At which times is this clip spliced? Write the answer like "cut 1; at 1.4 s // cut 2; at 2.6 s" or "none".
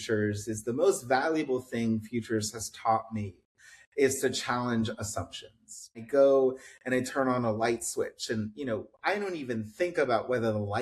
cut 1; at 6.0 s